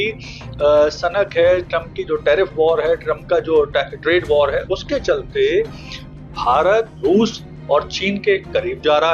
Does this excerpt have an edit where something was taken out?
yes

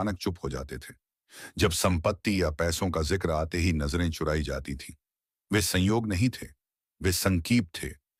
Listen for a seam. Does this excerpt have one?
no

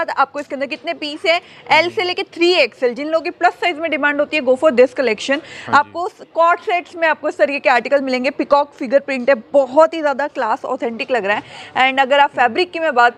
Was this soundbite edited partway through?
no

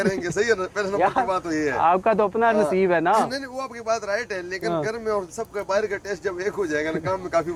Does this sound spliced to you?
no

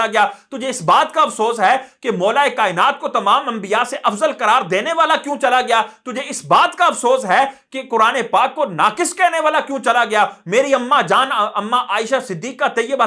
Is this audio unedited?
yes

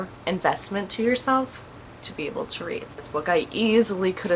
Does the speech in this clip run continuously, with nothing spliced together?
no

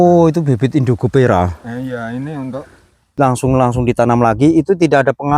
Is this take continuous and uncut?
no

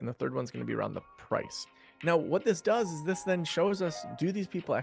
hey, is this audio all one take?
no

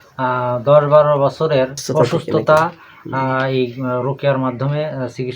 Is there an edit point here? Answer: yes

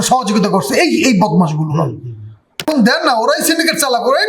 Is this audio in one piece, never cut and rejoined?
no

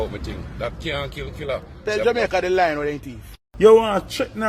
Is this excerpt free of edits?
no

